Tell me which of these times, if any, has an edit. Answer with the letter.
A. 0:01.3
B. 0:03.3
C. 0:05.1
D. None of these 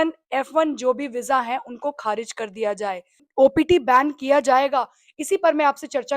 B